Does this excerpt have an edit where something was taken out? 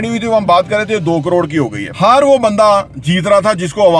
yes; 1 cut; at 1.8 s

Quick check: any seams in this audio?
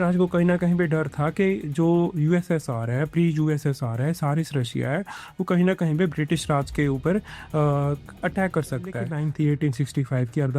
yes; 1 cut; at 9.1 s

